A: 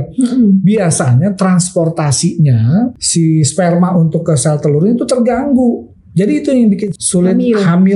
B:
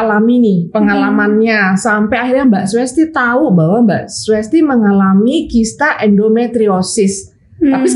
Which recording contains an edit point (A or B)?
A